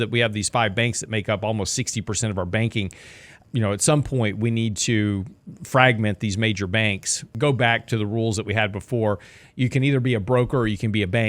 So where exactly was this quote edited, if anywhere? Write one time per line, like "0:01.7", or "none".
0:03.4
0:07.3